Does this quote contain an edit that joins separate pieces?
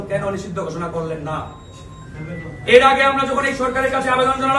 no; 0 cuts

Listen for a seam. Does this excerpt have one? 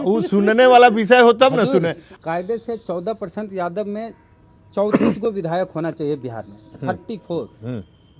yes; 1 cut; at 2.0 s

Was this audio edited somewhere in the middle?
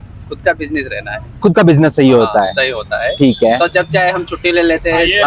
no; 0 cuts

